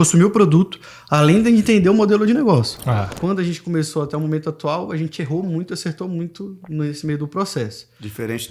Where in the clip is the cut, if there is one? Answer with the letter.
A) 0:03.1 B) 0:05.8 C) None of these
A